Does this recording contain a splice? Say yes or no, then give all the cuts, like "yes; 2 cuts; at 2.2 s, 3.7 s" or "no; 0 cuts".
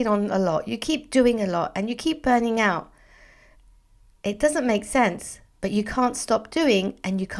no; 0 cuts